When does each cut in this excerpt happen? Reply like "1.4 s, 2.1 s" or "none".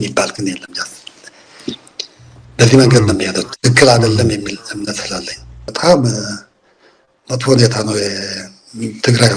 5.7 s